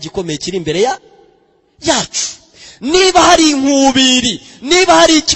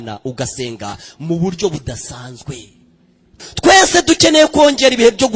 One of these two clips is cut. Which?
second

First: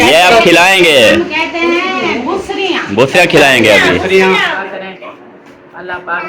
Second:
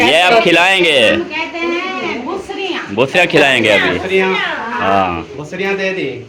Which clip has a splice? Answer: first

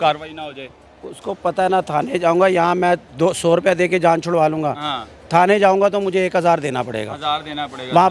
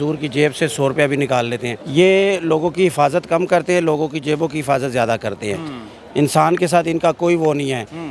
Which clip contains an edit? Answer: second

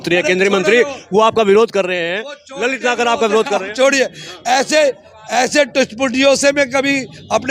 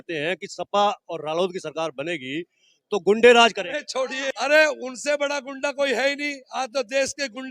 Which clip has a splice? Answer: second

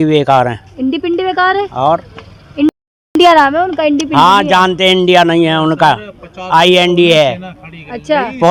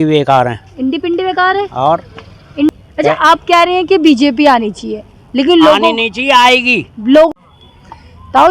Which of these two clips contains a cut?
second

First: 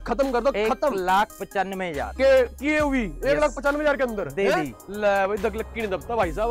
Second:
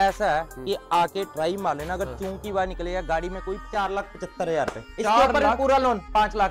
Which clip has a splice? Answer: second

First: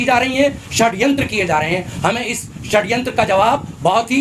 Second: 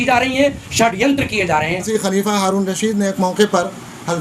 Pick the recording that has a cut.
second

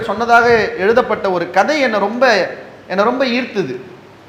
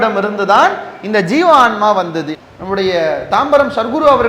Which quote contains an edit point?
second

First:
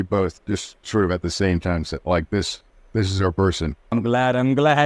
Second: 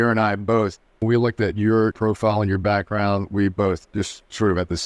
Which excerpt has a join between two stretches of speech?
second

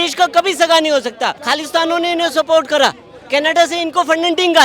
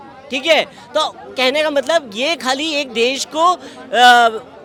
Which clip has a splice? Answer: first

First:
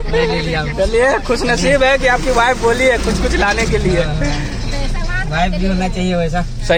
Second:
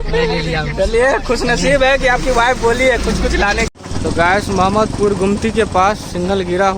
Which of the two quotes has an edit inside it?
second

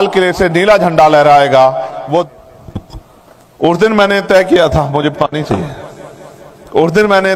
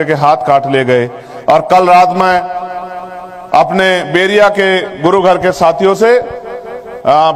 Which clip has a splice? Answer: first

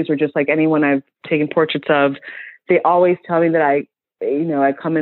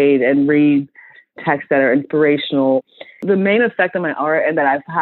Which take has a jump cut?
second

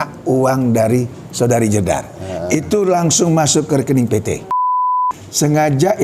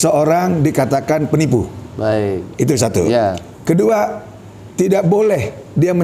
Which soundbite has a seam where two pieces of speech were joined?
first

